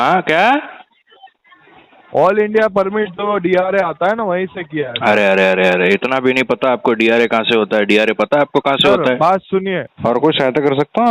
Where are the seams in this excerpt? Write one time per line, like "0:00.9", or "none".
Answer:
0:09.9